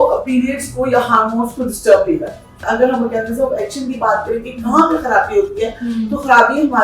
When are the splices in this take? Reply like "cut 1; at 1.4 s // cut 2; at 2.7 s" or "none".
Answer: cut 1; at 2.6 s